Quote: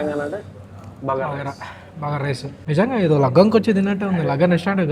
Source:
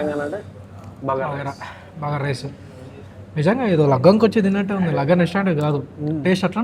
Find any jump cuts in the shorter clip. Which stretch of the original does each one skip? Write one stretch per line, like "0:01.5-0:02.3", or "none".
0:02.5-0:03.2